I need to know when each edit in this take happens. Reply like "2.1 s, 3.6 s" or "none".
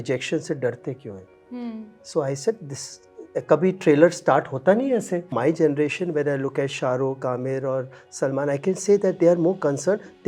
5.4 s